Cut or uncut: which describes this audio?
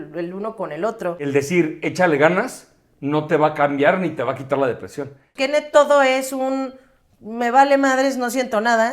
cut